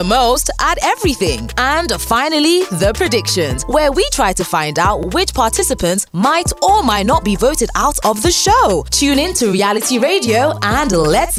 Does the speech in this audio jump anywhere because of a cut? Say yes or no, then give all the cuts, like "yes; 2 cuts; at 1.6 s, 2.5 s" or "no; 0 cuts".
no; 0 cuts